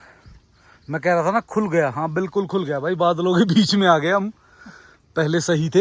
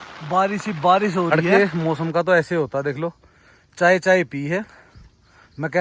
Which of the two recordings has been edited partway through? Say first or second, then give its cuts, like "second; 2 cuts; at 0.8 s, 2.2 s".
second; 1 cut; at 1.3 s